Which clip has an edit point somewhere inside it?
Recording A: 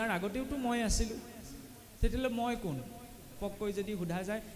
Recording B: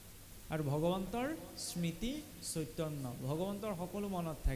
A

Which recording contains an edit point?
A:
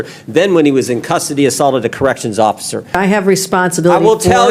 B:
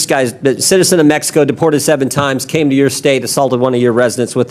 A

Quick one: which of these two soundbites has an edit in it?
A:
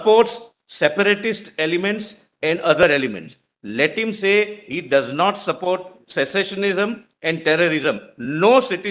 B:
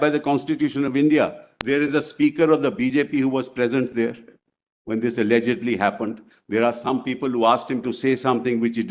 B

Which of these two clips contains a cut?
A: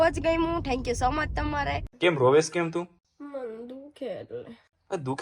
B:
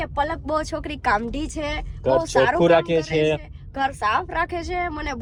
A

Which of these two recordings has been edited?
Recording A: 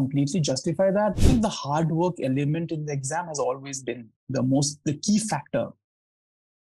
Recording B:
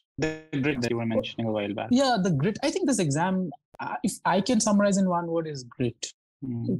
A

